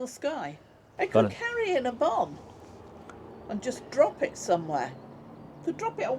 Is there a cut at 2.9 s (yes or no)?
no